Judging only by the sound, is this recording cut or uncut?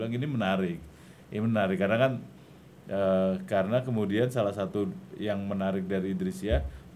uncut